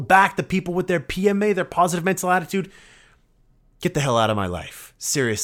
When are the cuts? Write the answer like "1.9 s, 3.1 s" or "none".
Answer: none